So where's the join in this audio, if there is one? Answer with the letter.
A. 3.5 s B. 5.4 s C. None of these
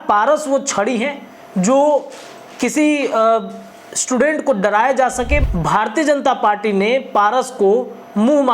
B